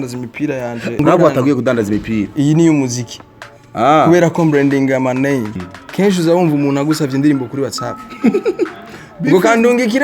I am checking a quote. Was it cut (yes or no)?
yes